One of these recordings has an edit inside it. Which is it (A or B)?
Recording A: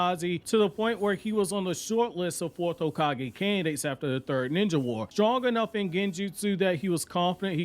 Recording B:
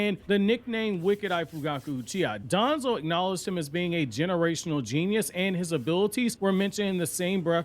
B